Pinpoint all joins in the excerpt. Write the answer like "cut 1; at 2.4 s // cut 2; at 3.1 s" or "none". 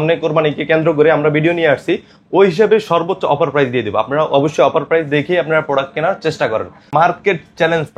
cut 1; at 6.9 s